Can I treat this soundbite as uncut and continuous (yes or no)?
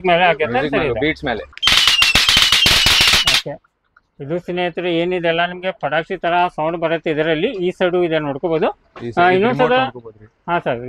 no